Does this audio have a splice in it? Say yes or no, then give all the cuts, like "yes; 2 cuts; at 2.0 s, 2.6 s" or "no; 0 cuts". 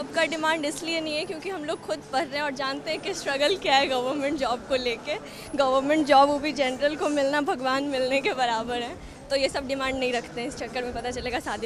no; 0 cuts